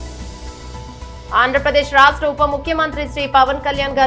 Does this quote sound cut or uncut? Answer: uncut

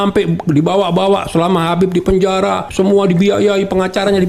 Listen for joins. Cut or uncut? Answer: cut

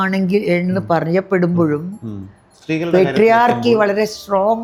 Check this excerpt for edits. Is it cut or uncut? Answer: uncut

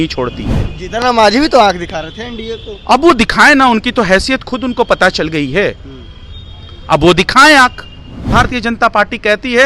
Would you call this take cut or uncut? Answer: cut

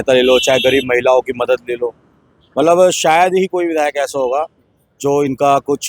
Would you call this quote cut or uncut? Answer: uncut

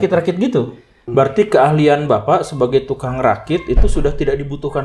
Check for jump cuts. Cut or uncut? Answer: cut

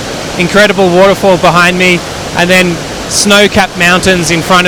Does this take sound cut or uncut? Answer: uncut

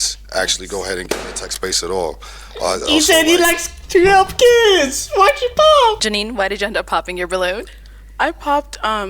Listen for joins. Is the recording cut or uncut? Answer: cut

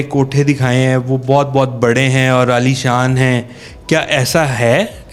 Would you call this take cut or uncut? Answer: uncut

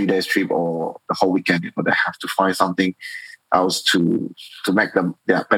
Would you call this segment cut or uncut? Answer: uncut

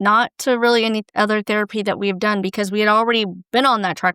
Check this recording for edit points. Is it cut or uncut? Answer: uncut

